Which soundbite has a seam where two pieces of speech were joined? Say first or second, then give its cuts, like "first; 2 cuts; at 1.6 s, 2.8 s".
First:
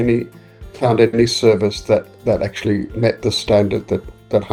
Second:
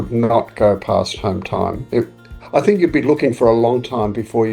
second; 1 cut; at 2.3 s